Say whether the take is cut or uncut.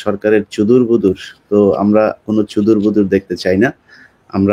uncut